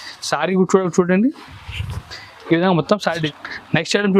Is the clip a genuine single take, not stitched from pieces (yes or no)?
no